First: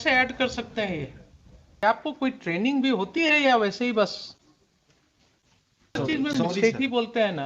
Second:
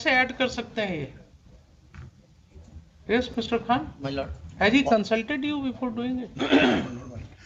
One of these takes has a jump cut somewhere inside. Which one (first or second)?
first